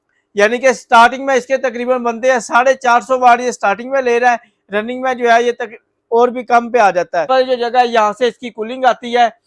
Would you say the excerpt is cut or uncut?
cut